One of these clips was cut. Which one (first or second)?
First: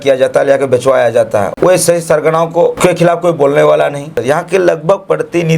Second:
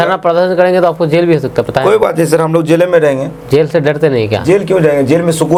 first